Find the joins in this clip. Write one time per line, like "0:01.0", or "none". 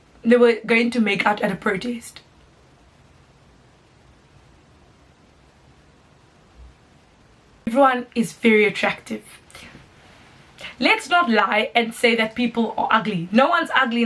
0:07.7